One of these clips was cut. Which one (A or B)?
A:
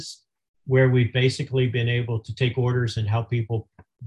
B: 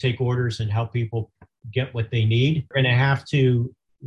B